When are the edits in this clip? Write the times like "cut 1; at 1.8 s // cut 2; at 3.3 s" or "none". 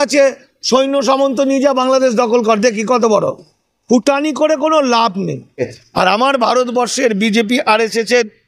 cut 1; at 5.8 s